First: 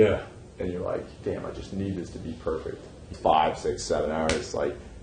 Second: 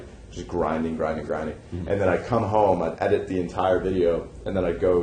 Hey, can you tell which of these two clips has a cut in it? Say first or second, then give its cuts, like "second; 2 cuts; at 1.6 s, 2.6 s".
first; 1 cut; at 3.1 s